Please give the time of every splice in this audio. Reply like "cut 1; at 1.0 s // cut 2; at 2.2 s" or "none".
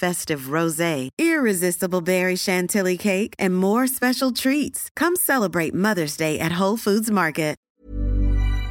cut 1; at 7.6 s